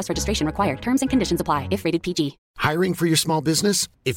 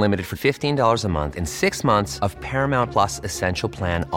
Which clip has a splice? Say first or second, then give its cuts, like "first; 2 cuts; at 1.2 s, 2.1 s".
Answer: first; 1 cut; at 2.5 s